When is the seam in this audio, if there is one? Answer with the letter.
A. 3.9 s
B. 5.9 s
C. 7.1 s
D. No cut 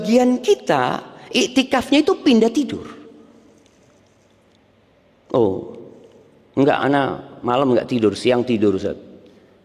D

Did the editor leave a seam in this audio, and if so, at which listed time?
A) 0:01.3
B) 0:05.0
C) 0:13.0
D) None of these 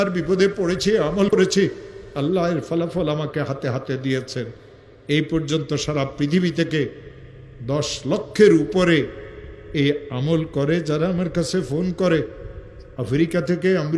A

